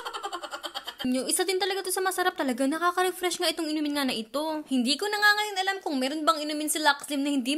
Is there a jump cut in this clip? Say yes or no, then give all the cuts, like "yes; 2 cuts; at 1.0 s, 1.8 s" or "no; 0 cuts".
yes; 1 cut; at 1.0 s